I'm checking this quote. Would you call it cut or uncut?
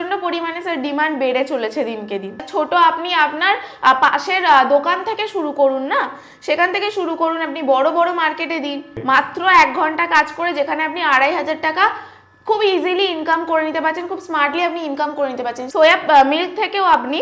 cut